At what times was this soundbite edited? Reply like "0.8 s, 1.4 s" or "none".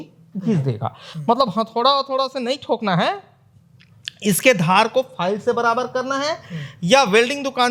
none

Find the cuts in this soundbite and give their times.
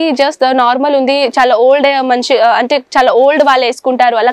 none

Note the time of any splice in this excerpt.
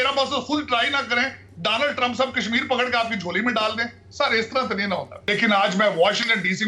5.1 s

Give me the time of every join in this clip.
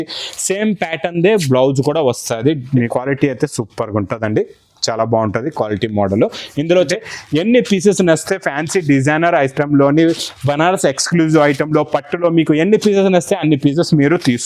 2.9 s, 6.9 s

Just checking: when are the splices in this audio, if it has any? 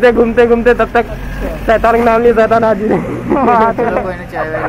none

